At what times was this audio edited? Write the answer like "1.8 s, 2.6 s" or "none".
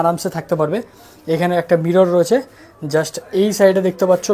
none